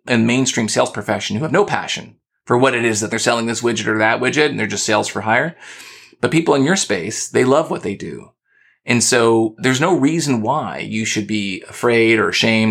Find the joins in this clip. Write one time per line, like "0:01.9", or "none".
none